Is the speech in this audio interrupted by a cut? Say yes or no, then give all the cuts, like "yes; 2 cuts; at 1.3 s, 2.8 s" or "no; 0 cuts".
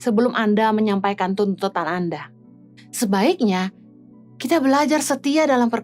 no; 0 cuts